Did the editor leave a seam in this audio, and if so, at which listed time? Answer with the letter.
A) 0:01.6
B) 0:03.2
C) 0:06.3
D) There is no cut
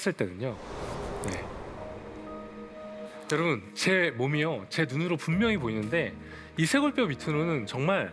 B